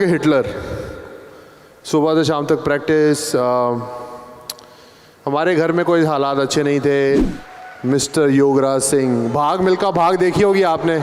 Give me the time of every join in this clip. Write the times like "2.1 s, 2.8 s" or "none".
7.3 s